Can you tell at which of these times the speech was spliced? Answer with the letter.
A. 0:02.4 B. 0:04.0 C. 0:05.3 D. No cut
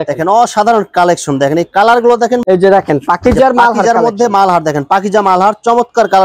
A